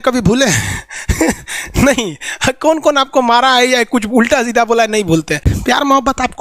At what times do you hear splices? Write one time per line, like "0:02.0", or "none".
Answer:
0:05.5